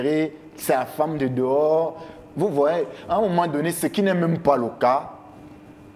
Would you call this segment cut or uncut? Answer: uncut